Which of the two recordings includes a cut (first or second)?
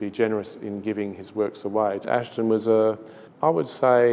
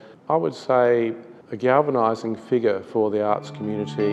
first